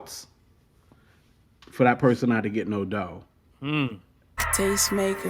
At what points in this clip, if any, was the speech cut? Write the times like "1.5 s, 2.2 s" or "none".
4.4 s